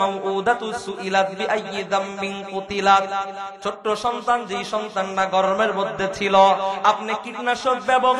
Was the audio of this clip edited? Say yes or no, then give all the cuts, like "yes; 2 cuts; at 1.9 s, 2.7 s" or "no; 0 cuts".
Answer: no; 0 cuts